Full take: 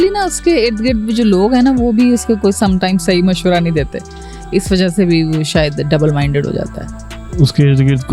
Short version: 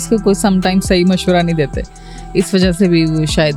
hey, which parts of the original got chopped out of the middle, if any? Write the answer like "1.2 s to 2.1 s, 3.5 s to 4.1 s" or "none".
none